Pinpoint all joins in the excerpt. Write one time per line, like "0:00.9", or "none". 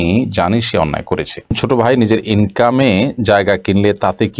0:01.6